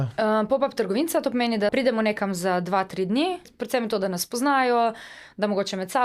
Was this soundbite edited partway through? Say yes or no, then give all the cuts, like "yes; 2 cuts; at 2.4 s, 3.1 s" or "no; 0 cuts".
yes; 2 cuts; at 1.7 s, 3.5 s